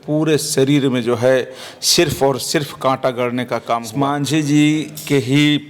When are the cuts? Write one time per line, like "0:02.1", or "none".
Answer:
0:04.1